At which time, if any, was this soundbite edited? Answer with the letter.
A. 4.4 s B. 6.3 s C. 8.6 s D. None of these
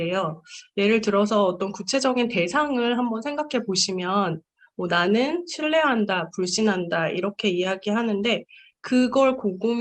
D